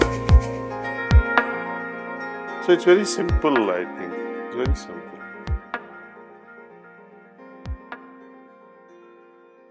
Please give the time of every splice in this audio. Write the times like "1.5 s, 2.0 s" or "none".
none